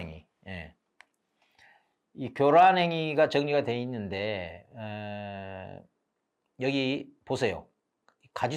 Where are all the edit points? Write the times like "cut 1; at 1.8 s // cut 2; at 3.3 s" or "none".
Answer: none